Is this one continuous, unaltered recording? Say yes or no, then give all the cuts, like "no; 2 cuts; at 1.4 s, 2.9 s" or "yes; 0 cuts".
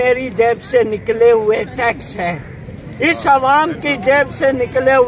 yes; 0 cuts